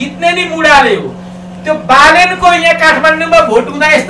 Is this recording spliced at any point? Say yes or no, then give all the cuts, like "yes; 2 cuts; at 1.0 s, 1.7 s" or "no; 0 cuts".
no; 0 cuts